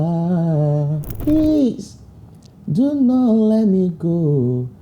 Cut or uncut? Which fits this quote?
cut